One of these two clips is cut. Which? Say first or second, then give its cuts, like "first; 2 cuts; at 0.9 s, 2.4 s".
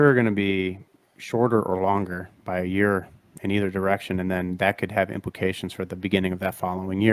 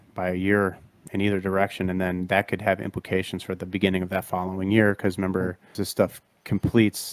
second; 1 cut; at 5.8 s